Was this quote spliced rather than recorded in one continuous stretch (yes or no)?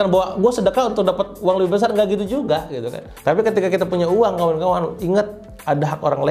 no